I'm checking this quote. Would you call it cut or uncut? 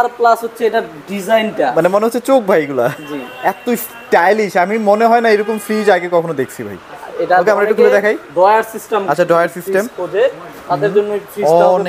uncut